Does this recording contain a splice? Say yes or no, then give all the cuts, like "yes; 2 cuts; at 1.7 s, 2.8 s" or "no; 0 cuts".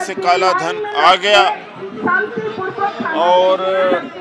no; 0 cuts